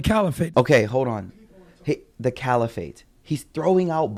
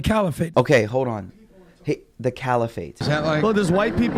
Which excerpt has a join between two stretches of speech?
second; 1 cut; at 3.0 s

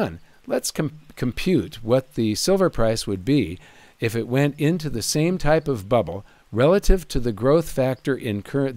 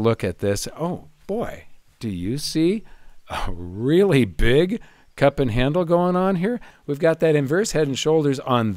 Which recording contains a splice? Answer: second; 1 cut; at 6.7 s

